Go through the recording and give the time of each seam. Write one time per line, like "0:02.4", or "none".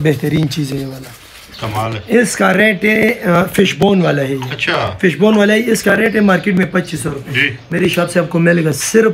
none